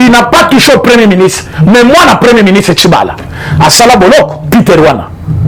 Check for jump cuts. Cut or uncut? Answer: uncut